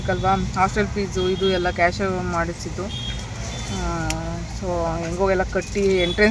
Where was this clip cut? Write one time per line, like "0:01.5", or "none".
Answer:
none